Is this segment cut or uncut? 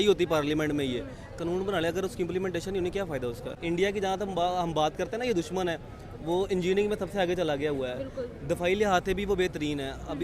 cut